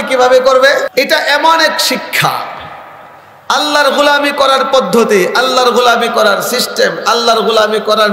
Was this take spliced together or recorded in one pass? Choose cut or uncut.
cut